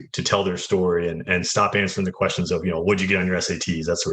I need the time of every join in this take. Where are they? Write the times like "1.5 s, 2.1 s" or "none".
1.2 s